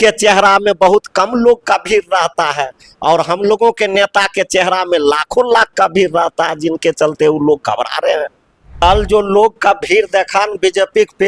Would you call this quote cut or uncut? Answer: cut